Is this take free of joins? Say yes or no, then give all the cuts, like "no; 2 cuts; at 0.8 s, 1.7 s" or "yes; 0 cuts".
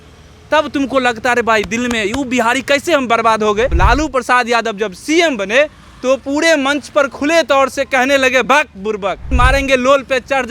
no; 2 cuts; at 3.7 s, 9.3 s